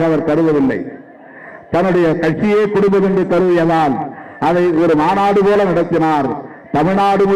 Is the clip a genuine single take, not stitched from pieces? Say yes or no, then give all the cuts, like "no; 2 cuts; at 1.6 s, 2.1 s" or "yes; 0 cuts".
yes; 0 cuts